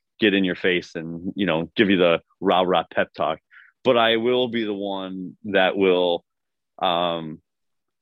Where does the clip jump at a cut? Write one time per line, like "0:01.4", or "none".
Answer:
none